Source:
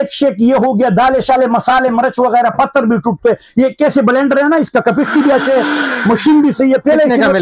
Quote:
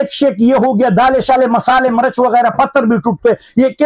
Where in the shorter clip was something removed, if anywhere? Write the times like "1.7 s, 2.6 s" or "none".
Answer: none

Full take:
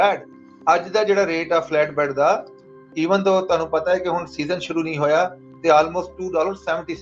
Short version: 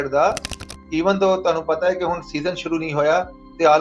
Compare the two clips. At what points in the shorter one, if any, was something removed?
none

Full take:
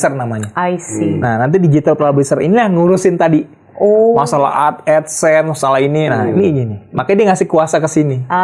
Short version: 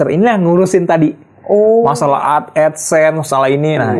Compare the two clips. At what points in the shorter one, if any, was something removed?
none

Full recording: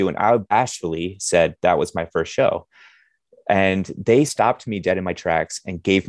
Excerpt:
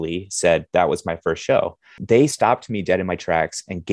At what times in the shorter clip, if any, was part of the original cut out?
2.0 s

